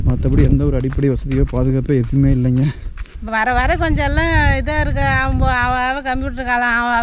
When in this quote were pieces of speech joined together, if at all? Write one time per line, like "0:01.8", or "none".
0:03.2